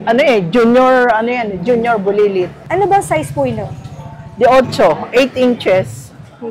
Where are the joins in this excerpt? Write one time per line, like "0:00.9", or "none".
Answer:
none